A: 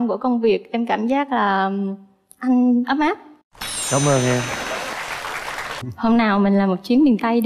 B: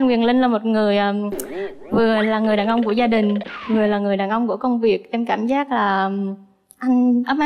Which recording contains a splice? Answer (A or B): A